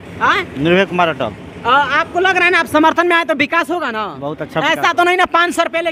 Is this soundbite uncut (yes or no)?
yes